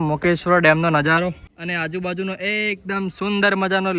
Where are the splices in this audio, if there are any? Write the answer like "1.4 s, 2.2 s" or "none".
1.5 s